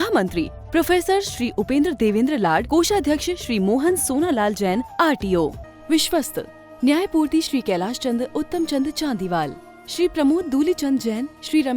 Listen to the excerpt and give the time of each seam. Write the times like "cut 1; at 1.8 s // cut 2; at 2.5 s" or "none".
cut 1; at 5.6 s